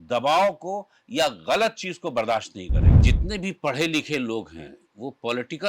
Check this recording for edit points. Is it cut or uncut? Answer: cut